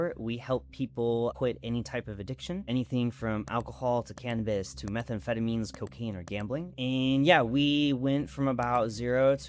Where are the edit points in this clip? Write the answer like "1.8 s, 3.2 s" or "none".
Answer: 1.3 s, 2.7 s, 6.7 s